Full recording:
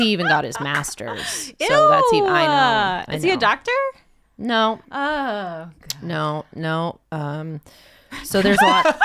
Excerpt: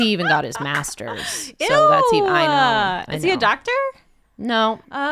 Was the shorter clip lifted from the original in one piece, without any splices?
yes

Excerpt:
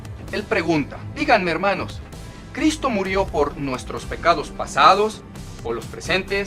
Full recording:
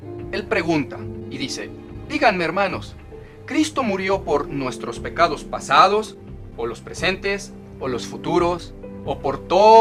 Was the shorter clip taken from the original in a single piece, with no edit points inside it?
no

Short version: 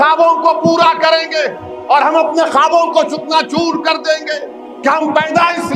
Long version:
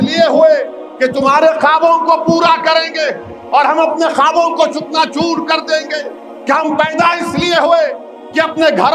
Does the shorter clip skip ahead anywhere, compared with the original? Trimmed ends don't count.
no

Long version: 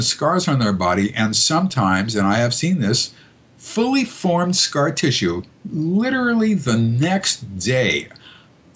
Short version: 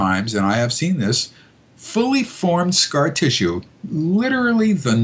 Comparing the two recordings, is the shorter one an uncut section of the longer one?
yes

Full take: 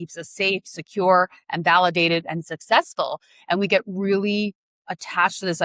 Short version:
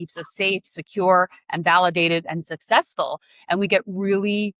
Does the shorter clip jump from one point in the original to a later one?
no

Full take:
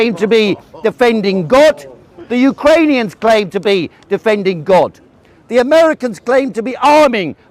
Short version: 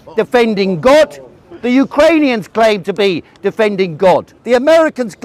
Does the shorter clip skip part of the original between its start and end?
yes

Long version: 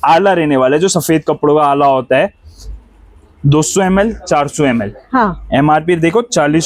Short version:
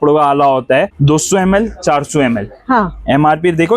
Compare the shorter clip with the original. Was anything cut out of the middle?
yes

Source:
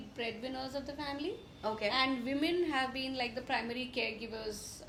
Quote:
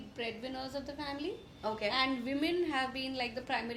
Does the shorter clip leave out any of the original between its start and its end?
no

